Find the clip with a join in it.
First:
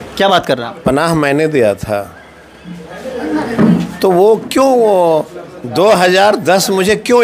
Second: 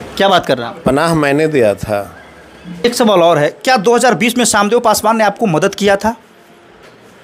second; 1 cut; at 2.8 s

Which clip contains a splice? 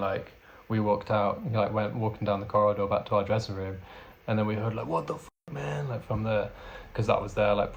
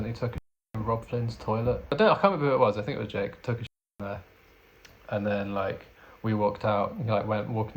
second; 1 cut; at 1.9 s

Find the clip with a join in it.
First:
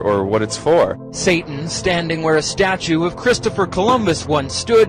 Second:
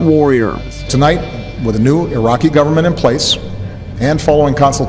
second; 1 cut; at 1.2 s

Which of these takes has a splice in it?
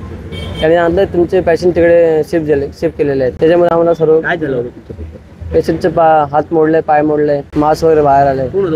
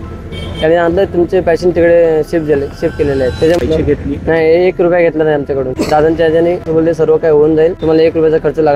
second; 1 cut; at 3.6 s

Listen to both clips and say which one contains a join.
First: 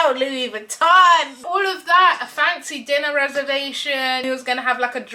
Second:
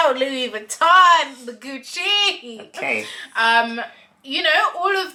first; 2 cuts; at 1.4 s, 4.2 s

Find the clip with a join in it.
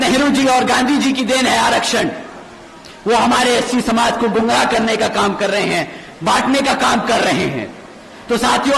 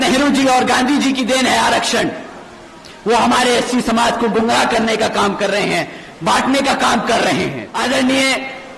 second; 1 cut; at 7.7 s

